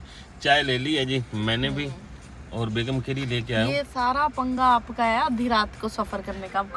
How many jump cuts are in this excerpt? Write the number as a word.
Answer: zero